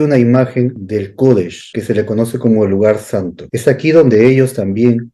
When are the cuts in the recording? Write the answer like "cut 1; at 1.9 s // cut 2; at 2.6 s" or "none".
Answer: cut 1; at 0.8 s // cut 2; at 1.6 s // cut 3; at 3.4 s